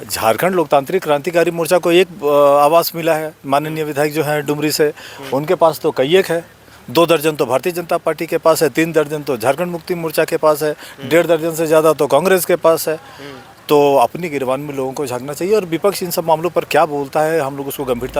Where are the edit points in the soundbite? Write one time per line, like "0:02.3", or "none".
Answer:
none